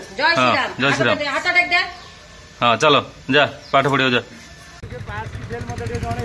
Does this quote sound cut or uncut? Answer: cut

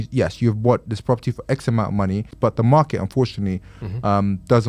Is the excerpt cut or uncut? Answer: cut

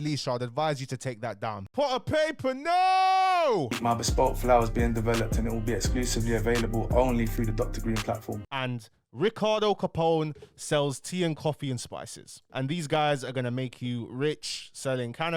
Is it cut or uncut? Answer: cut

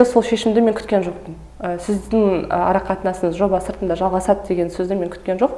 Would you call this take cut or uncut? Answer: uncut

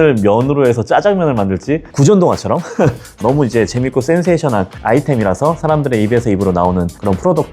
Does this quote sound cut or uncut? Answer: cut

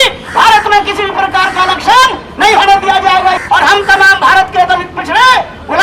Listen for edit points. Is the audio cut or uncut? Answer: cut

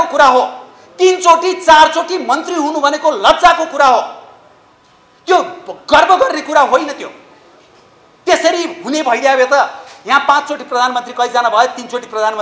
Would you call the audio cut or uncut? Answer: uncut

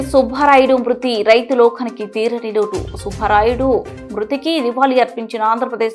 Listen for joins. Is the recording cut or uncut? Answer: uncut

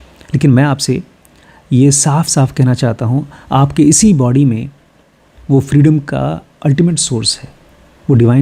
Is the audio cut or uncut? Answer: uncut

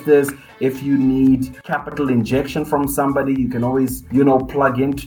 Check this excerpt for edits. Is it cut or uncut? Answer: cut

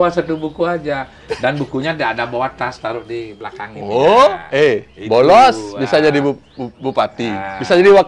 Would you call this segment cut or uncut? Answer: uncut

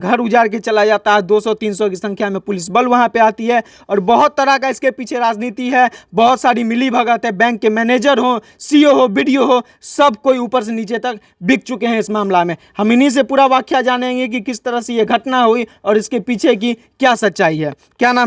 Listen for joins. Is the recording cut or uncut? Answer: uncut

